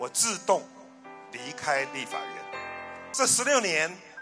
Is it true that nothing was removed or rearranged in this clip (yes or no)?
no